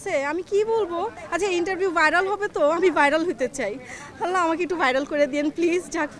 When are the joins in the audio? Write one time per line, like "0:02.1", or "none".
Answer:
none